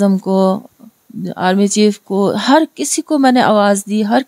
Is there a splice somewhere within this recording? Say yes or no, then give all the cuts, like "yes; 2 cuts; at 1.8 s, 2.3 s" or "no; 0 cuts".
no; 0 cuts